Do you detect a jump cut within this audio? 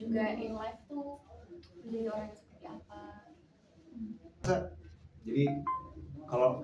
yes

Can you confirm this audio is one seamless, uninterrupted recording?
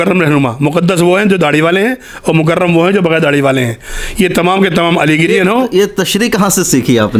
yes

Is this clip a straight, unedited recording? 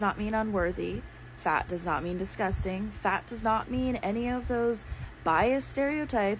yes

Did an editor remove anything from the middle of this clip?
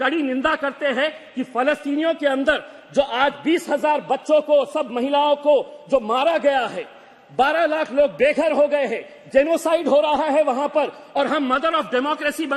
no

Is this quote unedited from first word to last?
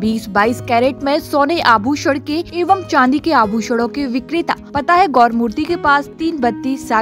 no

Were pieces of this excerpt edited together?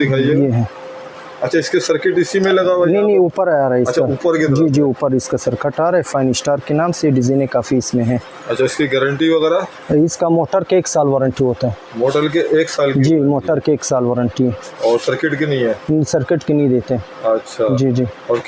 no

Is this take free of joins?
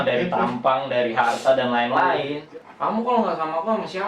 no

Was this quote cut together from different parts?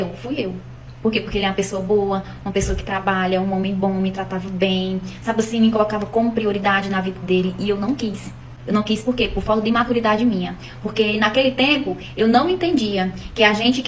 no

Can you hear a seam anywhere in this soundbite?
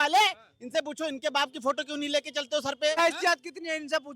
yes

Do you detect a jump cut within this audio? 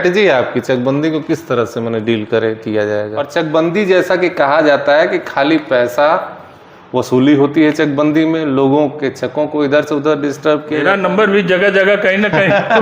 yes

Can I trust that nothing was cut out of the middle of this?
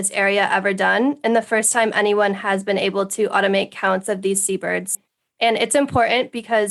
no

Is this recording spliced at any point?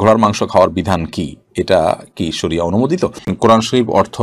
yes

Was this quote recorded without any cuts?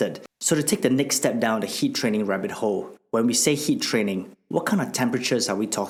yes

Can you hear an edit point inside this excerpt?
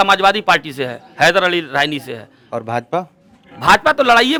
no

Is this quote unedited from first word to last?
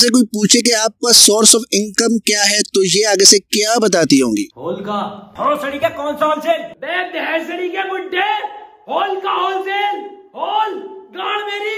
yes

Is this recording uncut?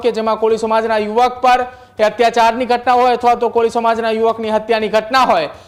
yes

